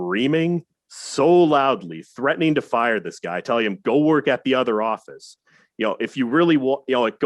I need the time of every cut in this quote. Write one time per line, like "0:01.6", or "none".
none